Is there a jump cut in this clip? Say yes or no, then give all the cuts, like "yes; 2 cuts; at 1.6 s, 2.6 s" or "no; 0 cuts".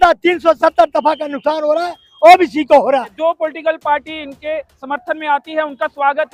yes; 1 cut; at 3.1 s